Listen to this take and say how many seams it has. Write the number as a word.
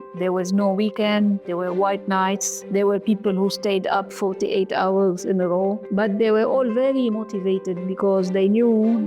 three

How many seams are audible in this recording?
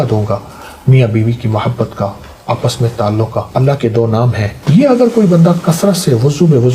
two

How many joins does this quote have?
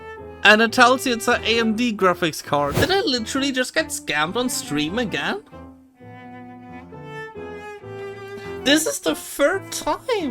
one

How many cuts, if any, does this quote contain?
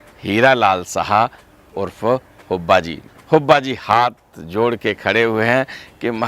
one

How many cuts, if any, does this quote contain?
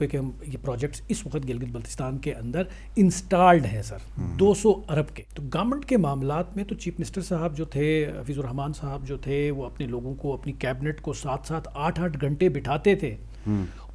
one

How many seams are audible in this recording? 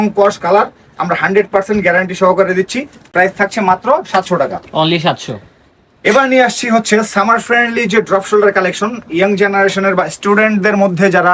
zero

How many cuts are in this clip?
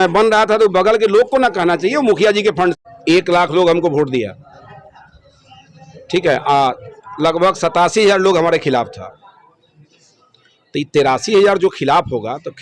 one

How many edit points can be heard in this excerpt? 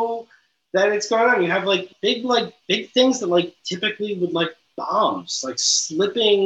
one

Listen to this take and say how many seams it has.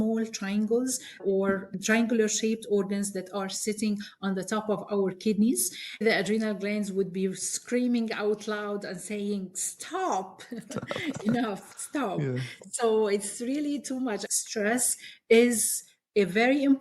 two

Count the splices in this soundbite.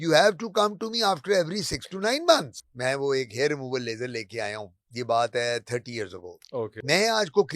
two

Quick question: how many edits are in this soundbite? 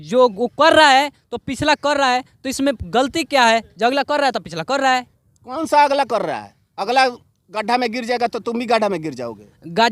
zero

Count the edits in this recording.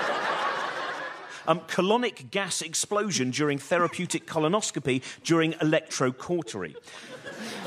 one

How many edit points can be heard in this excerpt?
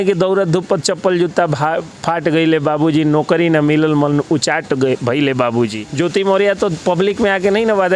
one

